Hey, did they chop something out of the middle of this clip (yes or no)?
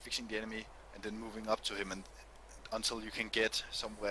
yes